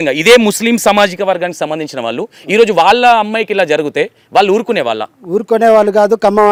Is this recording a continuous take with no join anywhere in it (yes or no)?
yes